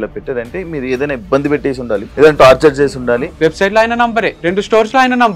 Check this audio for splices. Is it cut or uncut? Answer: cut